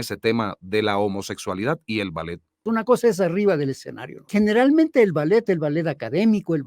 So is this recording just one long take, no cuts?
no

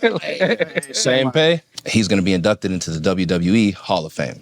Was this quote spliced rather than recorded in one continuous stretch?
yes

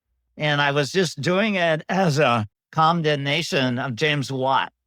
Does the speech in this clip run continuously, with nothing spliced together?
no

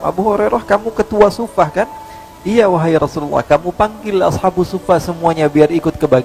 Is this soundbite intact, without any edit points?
yes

